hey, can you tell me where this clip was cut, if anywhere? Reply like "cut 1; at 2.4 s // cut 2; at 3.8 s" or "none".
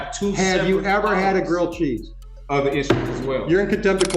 cut 1; at 2.3 s